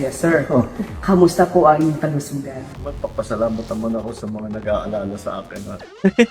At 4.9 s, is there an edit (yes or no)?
no